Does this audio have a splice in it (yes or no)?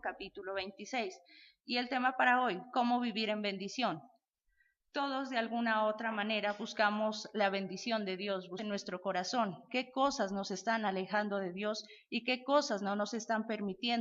no